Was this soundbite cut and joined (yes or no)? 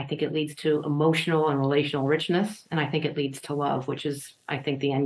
no